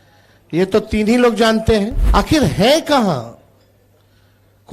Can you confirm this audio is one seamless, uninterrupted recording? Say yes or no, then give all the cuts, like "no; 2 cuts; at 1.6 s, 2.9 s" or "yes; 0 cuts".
no; 1 cut; at 2.0 s